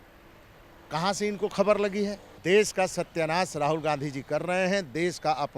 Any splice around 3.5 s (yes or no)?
no